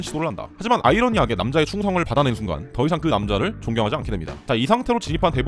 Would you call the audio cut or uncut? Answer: uncut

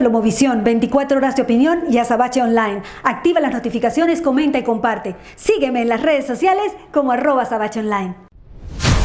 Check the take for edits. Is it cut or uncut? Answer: cut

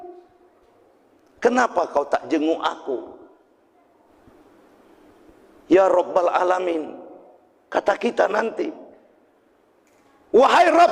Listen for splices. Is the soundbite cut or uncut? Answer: cut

